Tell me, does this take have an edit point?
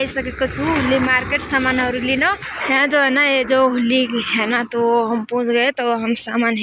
yes; 1 cut; at 2.5 s

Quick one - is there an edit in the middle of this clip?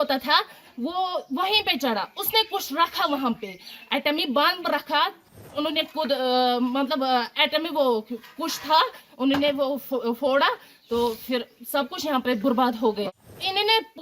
yes; 2 cuts; at 5.4 s, 13.0 s

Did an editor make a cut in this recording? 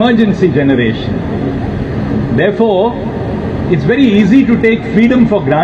no; 0 cuts

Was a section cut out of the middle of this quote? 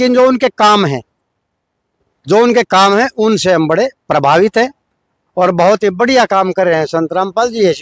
no; 0 cuts

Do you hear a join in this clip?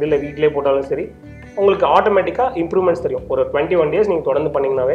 no; 0 cuts

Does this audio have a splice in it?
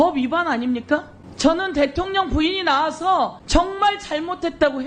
yes; 2 cuts; at 1.2 s, 3.4 s

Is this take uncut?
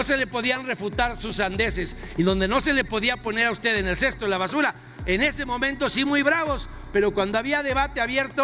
yes; 0 cuts

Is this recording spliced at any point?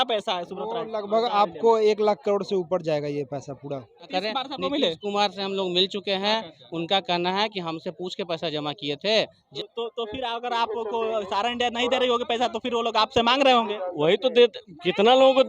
yes; 2 cuts; at 4.1 s, 9.4 s

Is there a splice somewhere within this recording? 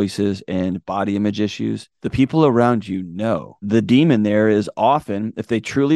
yes; 2 cuts; at 1.9 s, 3.3 s

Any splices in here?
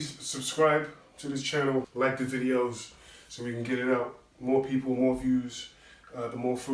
yes; 1 cut; at 1.9 s

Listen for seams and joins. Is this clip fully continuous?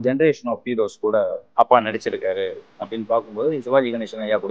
no; 1 cut; at 1.4 s

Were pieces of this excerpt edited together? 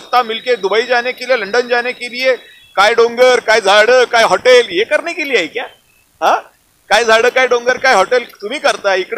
no; 0 cuts

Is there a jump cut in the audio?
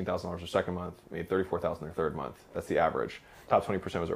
no; 0 cuts

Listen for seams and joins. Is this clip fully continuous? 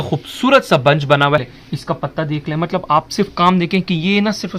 no; 1 cut; at 1.5 s

